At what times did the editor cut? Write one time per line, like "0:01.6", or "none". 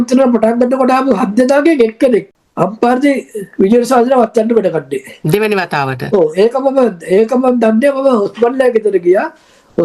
0:02.3